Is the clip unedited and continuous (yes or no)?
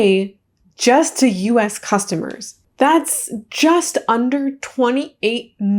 no